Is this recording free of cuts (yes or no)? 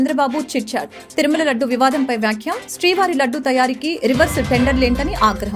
yes